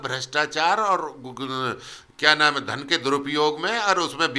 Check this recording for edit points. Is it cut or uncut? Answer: uncut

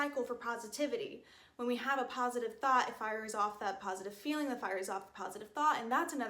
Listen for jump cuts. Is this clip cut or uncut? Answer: uncut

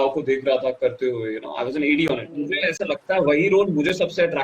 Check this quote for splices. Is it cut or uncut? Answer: cut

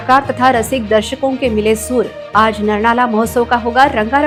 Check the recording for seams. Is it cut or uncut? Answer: uncut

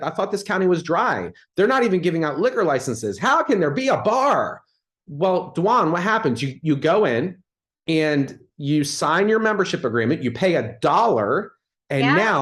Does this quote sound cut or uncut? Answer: uncut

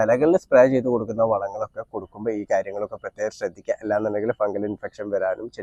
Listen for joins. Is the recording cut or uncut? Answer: uncut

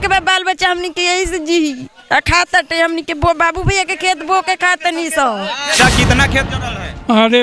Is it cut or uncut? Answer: cut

